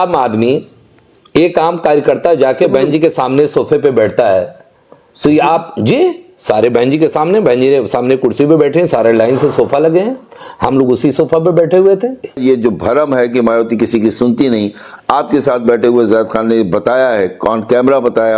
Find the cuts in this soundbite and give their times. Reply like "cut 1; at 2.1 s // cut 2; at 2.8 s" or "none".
cut 1; at 12.4 s